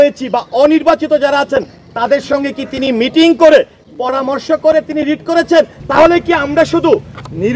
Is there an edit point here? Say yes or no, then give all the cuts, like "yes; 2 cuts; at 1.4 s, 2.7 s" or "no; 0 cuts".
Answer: yes; 1 cut; at 5.8 s